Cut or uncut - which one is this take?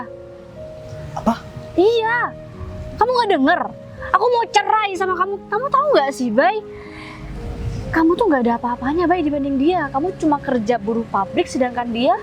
uncut